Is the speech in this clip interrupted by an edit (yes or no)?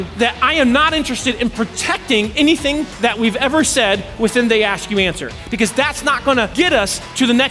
yes